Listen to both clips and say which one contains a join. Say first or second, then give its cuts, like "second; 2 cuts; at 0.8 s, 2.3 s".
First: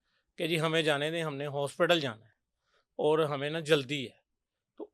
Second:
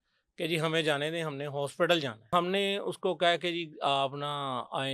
second; 1 cut; at 2.3 s